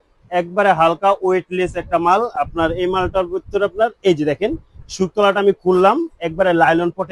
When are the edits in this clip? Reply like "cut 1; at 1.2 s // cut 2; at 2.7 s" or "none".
none